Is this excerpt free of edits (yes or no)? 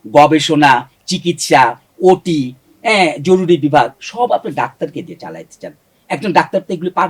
yes